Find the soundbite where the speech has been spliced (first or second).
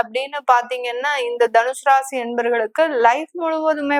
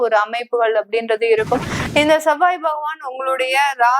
second